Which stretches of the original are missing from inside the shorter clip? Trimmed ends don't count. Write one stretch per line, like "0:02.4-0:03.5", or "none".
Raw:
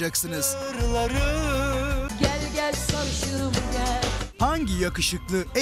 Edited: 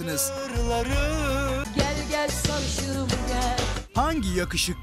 0:01.9-0:02.1